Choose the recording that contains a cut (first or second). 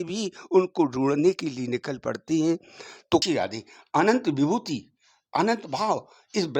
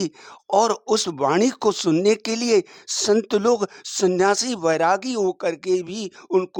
first